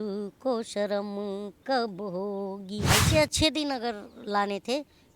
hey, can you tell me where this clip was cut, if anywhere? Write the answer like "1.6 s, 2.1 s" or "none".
2.8 s